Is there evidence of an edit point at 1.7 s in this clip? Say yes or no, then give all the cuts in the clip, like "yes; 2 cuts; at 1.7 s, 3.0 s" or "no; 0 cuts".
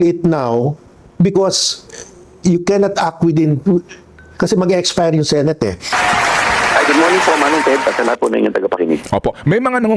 no; 1 cut; at 5.9 s